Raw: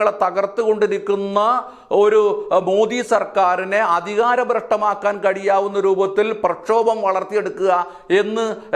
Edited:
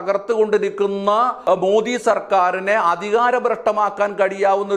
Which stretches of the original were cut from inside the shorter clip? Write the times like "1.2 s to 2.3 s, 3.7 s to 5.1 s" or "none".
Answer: 1.7 s to 2.4 s

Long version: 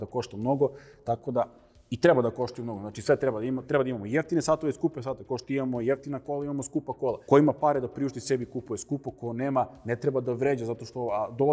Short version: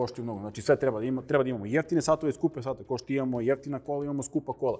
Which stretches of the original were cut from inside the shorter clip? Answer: none

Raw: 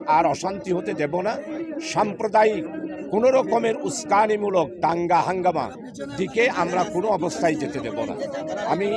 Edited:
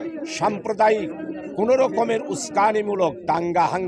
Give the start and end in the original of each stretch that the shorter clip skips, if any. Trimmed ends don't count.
none

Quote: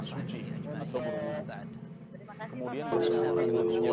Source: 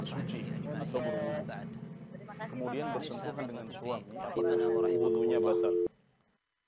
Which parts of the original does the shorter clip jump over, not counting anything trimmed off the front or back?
2.9 s to 4.4 s

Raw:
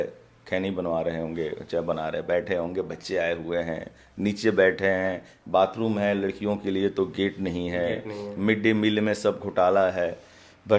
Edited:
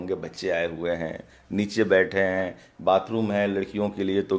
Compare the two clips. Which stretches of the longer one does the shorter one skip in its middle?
none

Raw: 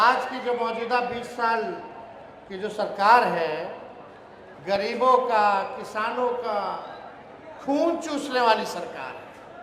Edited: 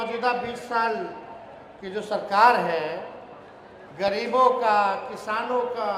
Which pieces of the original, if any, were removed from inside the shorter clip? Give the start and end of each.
none

